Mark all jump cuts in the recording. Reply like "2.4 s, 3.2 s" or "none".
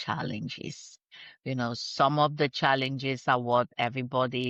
none